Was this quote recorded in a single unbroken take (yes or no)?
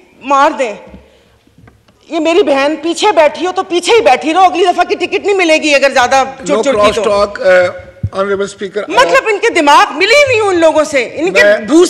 yes